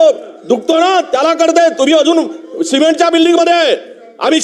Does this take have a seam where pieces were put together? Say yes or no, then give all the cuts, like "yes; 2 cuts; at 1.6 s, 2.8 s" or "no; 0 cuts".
no; 0 cuts